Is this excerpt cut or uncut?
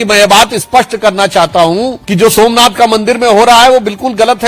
cut